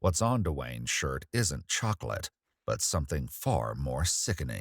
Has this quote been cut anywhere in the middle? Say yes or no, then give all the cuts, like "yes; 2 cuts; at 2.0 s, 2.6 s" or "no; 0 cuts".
no; 0 cuts